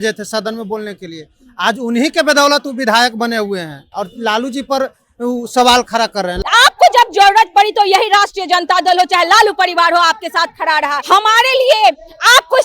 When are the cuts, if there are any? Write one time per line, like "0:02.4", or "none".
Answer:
0:03.8
0:06.4
0:11.0